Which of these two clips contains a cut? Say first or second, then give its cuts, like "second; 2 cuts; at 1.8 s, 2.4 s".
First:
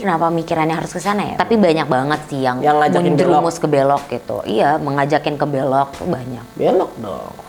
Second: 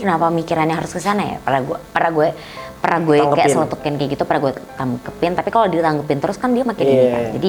first; 1 cut; at 1.3 s